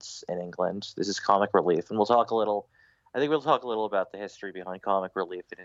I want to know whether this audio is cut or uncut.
uncut